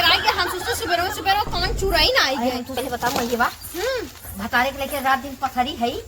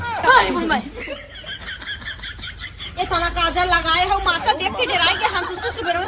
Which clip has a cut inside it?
first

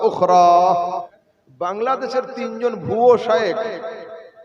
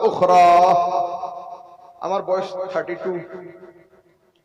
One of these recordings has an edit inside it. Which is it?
first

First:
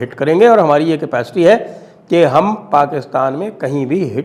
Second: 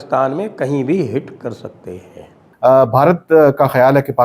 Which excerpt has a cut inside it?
second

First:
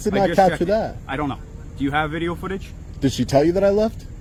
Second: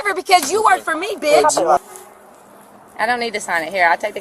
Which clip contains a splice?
second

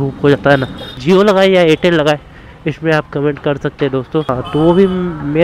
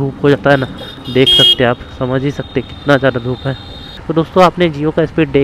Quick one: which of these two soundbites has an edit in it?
first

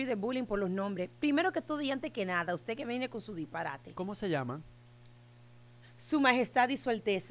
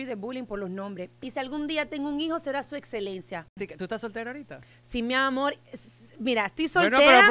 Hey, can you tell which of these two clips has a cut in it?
second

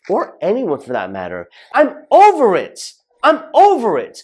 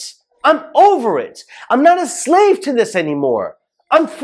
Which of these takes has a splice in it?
first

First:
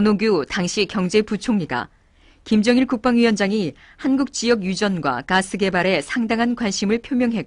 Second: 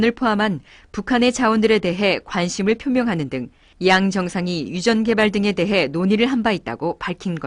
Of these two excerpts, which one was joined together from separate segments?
first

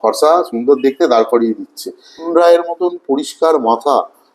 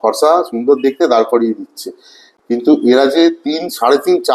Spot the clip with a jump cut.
first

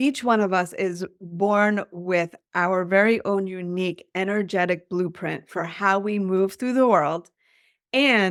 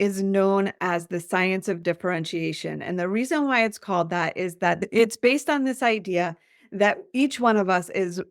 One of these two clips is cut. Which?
second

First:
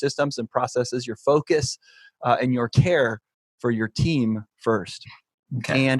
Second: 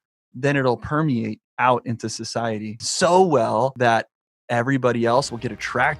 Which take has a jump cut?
second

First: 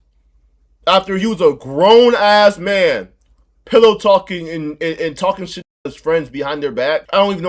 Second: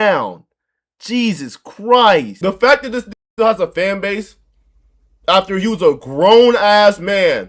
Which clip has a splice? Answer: second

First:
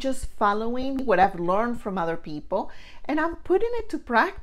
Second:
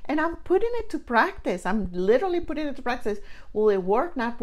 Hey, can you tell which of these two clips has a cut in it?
first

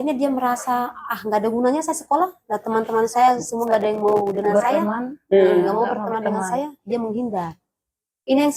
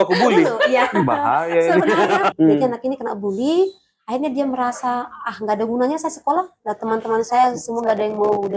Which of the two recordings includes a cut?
second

